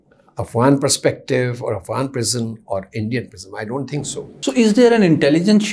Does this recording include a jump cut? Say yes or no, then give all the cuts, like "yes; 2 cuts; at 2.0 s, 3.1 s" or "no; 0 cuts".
yes; 1 cut; at 4.3 s